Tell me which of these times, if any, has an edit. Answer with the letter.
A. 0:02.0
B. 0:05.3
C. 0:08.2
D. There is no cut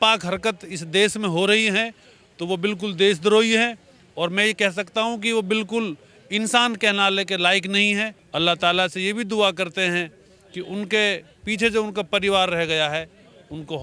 C